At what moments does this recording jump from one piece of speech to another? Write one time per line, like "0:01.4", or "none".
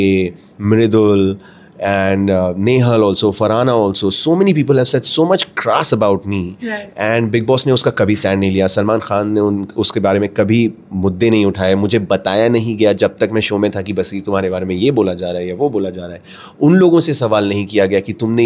none